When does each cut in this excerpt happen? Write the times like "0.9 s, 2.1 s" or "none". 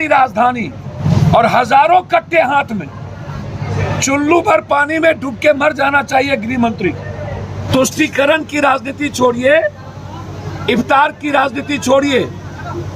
0.9 s, 3.7 s, 7.5 s